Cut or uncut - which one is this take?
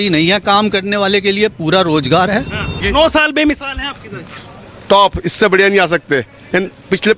cut